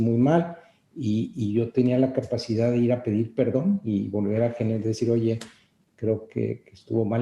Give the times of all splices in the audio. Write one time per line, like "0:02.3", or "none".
none